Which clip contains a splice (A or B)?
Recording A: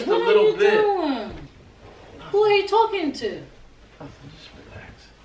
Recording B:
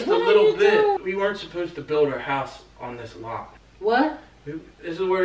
B